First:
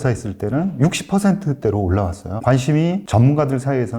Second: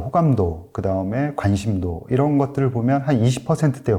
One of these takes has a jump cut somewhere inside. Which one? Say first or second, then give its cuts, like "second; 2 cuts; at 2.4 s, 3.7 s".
first; 2 cuts; at 2.3 s, 3.0 s